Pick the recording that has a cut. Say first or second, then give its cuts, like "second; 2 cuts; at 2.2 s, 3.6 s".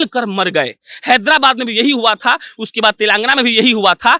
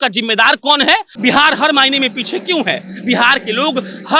second; 1 cut; at 1.1 s